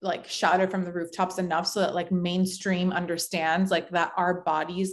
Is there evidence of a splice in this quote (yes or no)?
no